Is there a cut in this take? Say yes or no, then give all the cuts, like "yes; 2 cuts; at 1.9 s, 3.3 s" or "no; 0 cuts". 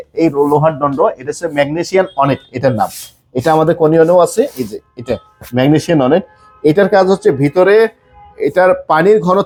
no; 0 cuts